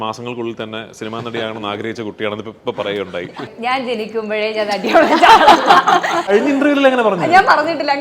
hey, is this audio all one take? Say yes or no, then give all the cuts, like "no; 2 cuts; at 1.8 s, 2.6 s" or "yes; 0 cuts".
no; 2 cuts; at 3.5 s, 6.3 s